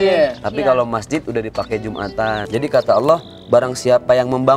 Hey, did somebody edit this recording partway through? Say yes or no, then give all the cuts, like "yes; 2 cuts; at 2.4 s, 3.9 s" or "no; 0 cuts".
yes; 1 cut; at 2.4 s